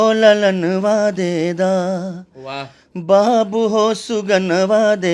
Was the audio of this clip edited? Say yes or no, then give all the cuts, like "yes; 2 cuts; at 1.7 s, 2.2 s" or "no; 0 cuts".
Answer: no; 0 cuts